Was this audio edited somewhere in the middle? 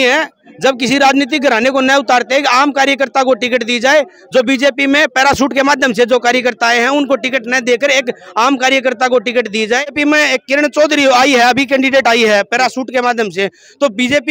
no; 0 cuts

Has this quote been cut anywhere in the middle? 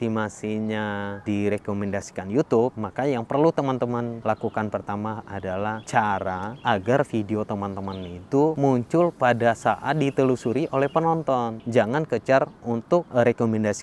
yes; 8 cuts; at 1.2 s, 2.8 s, 4.2 s, 5.6 s, 6.5 s, 8.6 s, 11.6 s, 13.1 s

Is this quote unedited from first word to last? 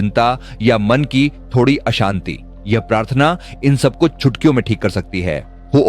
yes; 0 cuts

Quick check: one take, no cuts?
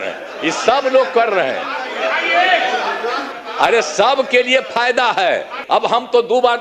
no; 2 cuts; at 3.3 s, 5.6 s

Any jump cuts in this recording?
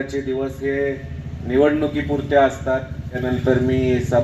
yes; 1 cut; at 3.2 s

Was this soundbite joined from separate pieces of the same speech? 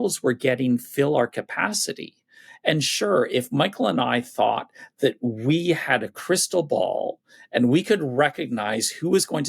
no; 0 cuts

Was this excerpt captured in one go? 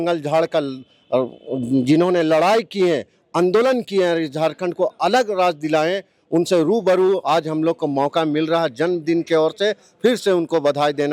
yes; 0 cuts

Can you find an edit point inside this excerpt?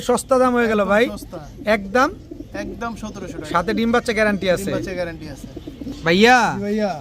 no; 0 cuts

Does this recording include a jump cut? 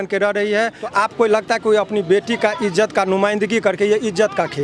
yes; 1 cut; at 0.9 s

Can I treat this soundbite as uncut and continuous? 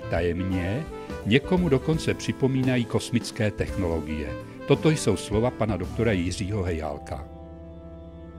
no; 1 cut; at 7.3 s

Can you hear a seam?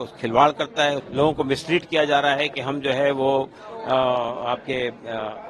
yes; 1 cut; at 1.0 s

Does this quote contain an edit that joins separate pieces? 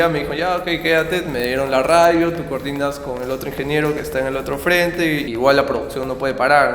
yes; 1 cut; at 5.3 s

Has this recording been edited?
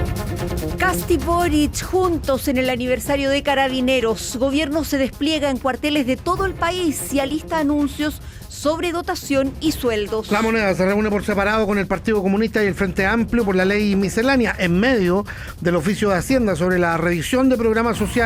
yes; 1 cut; at 1.1 s

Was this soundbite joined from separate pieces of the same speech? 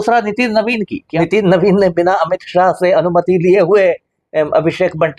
yes; 1 cut; at 1.0 s

